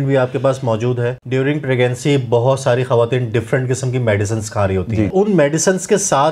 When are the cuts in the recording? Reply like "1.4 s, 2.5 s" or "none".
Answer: 1.1 s, 5.1 s